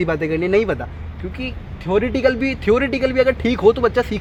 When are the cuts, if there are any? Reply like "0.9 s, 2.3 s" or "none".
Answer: none